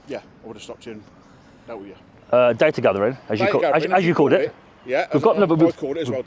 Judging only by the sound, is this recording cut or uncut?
cut